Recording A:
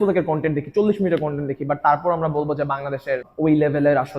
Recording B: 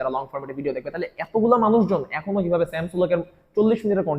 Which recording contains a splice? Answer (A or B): A